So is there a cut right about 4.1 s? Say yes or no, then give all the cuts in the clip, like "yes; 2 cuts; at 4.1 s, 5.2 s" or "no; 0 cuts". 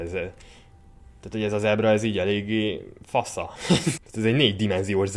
yes; 1 cut; at 4.1 s